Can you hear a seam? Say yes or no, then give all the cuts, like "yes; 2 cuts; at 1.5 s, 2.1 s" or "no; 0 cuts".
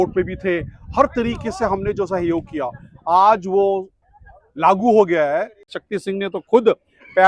yes; 1 cut; at 5.8 s